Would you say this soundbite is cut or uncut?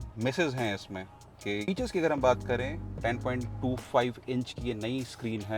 cut